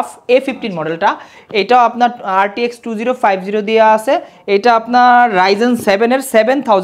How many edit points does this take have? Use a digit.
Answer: 0